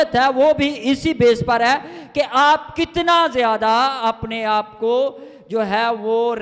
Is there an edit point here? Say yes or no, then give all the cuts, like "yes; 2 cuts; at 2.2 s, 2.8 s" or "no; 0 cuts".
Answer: no; 0 cuts